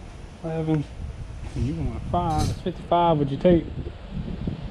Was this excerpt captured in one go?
yes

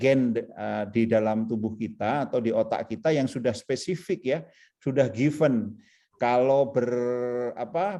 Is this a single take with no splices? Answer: yes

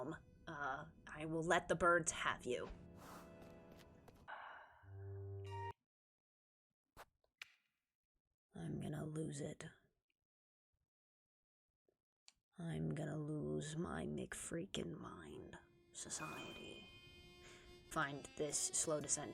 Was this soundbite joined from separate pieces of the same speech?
yes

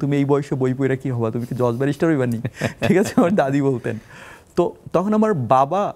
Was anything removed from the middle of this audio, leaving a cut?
no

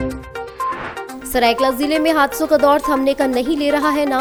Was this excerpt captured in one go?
yes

